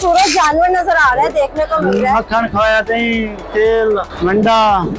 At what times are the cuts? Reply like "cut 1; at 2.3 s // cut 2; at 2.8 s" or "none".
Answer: cut 1; at 2.8 s // cut 2; at 4.1 s